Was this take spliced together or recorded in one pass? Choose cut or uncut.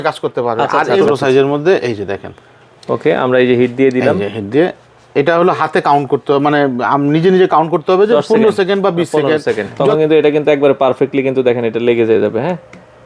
cut